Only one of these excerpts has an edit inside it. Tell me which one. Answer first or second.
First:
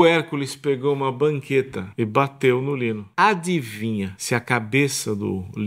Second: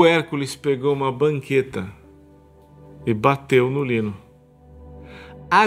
first